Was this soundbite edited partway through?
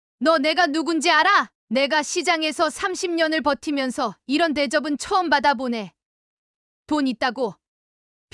yes; 1 cut; at 1.5 s

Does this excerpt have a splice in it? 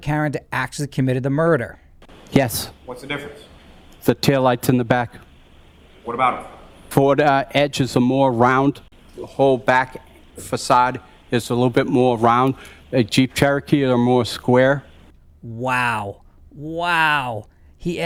no; 0 cuts

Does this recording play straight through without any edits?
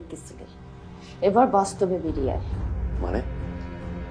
yes; 0 cuts

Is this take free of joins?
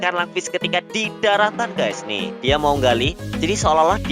no; 1 cut; at 2.3 s

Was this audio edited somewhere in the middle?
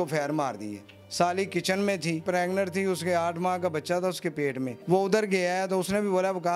yes; 3 cuts; at 0.9 s, 2.2 s, 4.7 s

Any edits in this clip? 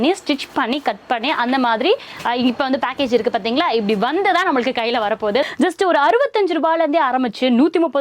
yes; 1 cut; at 5.4 s

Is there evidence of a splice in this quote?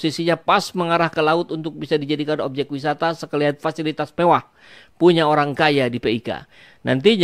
no; 0 cuts

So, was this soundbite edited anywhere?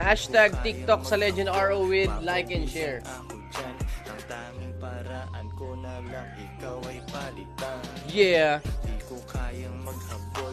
no; 0 cuts

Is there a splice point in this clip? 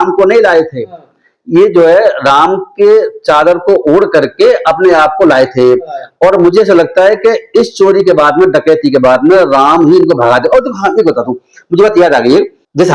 no; 0 cuts

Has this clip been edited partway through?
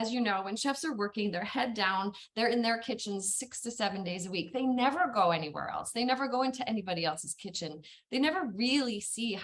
no; 0 cuts

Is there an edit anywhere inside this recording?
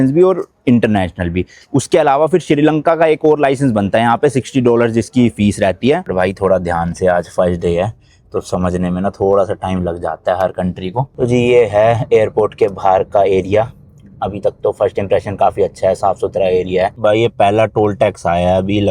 yes; 3 cuts; at 6.1 s, 11.1 s, 17.0 s

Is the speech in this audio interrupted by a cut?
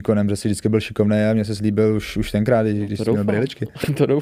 no; 0 cuts

